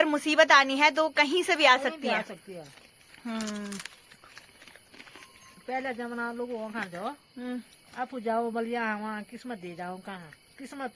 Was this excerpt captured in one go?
yes; 0 cuts

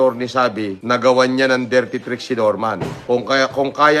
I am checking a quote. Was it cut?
yes; 1 cut; at 3.1 s

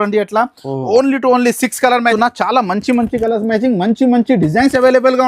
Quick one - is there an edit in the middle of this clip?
yes; 1 cut; at 2.1 s

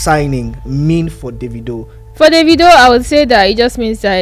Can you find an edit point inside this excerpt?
yes; 1 cut; at 2.0 s

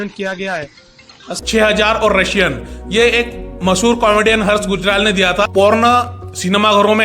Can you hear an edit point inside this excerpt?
yes; 2 cuts; at 1.3 s, 5.5 s

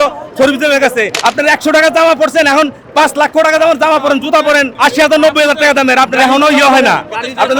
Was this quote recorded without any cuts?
no; 2 cuts; at 1.1 s, 4.7 s

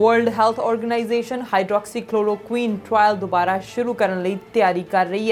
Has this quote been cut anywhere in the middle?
no; 0 cuts

